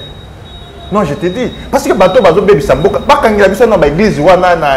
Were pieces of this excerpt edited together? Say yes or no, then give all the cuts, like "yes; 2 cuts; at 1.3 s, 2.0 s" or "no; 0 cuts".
no; 0 cuts